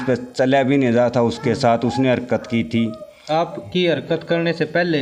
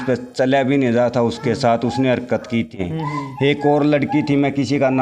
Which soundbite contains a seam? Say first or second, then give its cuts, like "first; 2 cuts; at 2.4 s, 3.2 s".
second; 1 cut; at 2.7 s